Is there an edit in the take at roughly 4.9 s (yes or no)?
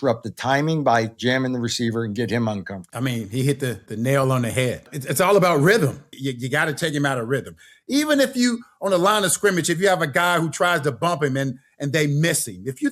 yes